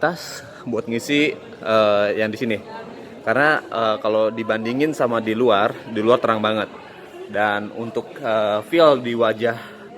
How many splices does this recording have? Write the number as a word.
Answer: one